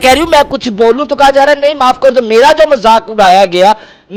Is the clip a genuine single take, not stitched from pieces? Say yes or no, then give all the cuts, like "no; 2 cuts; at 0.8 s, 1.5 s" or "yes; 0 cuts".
yes; 0 cuts